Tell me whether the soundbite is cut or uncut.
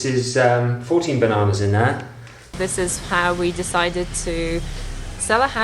cut